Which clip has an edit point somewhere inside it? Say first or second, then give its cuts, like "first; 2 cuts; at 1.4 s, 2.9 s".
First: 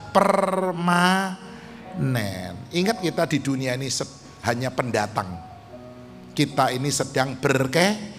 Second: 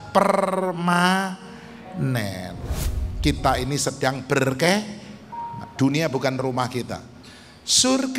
second; 1 cut; at 2.6 s